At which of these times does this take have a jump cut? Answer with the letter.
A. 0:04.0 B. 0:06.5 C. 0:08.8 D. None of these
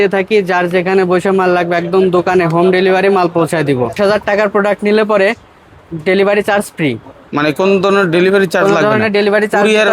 A